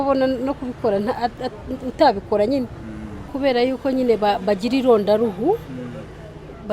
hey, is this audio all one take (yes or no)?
no